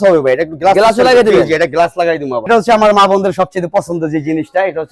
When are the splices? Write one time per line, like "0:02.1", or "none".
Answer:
0:02.5